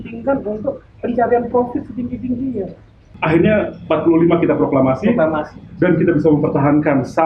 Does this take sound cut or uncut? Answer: cut